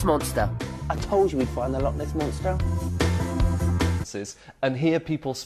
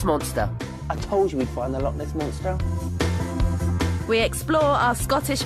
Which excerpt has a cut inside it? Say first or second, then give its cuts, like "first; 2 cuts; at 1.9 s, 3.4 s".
second; 1 cut; at 4.0 s